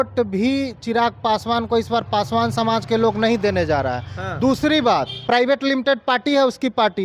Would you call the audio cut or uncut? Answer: cut